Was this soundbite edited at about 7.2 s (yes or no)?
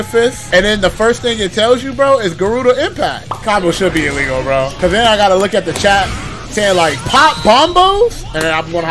no